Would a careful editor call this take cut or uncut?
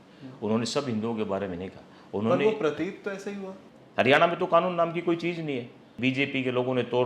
cut